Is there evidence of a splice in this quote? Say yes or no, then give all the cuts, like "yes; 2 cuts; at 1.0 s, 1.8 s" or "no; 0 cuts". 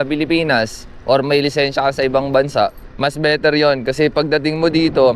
yes; 1 cut; at 2.9 s